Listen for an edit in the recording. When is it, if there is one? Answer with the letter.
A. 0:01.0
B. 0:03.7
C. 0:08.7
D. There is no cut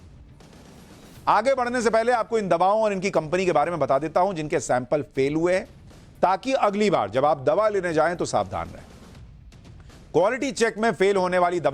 D